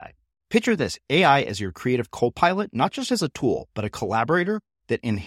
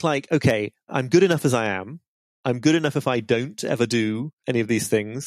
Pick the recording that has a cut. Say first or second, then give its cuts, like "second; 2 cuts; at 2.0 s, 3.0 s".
second; 2 cuts; at 0.9 s, 4.3 s